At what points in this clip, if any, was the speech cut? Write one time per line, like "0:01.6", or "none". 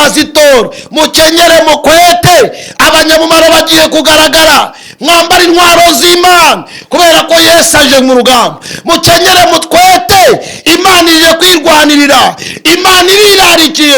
none